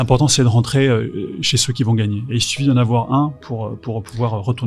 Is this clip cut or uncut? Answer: uncut